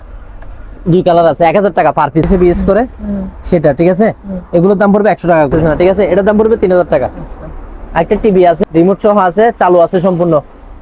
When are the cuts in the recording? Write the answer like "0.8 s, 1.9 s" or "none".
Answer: 2.3 s, 5.5 s, 8.6 s